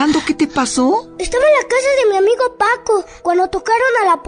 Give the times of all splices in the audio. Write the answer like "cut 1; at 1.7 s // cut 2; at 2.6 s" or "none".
cut 1; at 3.1 s